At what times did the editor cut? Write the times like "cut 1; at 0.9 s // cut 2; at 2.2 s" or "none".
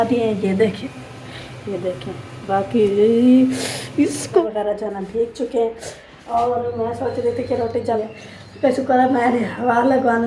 cut 1; at 0.7 s // cut 2; at 4.4 s // cut 3; at 8.0 s